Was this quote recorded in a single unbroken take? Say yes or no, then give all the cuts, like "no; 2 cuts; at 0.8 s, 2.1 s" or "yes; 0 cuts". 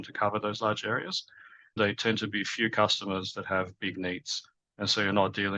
no; 1 cut; at 1.8 s